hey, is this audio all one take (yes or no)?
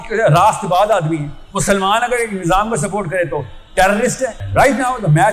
no